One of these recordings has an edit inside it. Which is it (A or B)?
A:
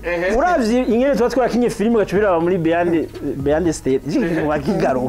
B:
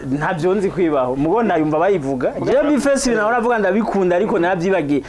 B